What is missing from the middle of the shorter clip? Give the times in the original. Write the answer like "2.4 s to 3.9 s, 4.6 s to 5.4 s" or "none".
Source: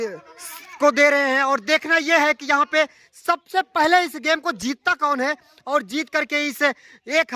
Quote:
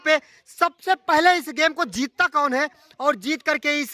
none

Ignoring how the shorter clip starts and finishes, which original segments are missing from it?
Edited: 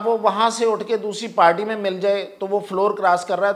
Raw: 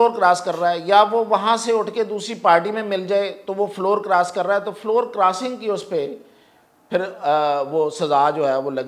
none

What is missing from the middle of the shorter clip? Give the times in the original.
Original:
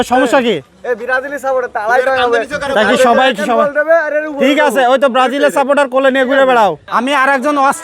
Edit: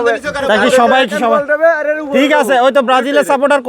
none

